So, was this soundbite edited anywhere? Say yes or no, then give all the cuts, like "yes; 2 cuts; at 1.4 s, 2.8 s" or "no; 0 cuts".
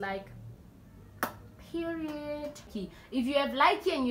yes; 1 cut; at 2.7 s